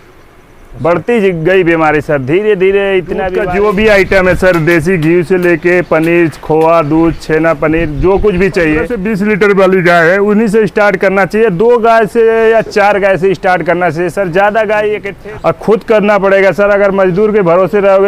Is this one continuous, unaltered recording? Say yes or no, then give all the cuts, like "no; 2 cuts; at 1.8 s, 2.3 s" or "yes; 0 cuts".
no; 3 cuts; at 3.4 s, 8.9 s, 15.1 s